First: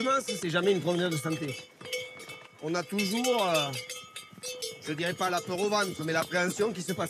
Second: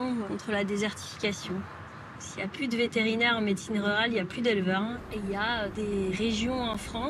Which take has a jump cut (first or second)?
second